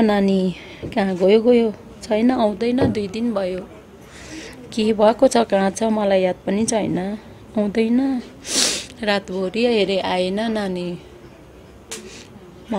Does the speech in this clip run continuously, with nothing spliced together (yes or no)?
yes